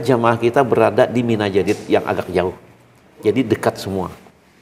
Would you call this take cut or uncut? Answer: uncut